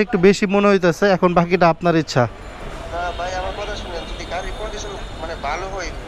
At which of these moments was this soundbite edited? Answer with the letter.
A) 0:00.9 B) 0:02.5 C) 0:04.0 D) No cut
D